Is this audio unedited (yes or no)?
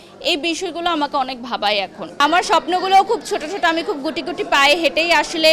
no